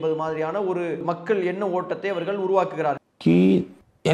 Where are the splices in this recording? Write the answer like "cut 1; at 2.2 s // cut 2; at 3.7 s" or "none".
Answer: cut 1; at 3.1 s